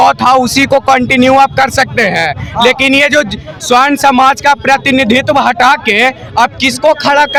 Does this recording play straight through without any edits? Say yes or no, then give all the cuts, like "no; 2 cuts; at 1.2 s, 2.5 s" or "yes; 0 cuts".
yes; 0 cuts